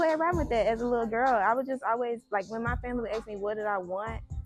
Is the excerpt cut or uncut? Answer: uncut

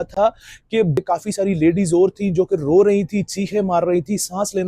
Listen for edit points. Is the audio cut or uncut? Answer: cut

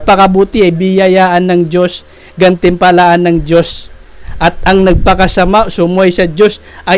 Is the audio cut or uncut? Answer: uncut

